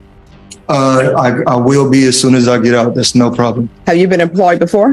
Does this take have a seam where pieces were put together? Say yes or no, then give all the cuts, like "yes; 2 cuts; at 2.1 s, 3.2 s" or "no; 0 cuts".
no; 0 cuts